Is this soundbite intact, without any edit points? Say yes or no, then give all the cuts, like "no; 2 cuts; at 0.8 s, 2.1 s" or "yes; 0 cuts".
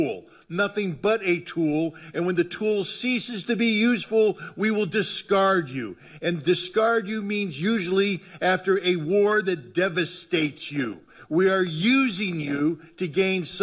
yes; 0 cuts